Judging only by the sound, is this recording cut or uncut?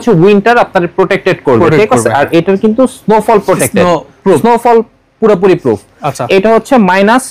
uncut